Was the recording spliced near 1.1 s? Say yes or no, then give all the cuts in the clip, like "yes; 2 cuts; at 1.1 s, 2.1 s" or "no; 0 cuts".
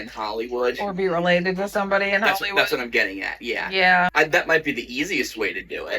no; 1 cut; at 4.1 s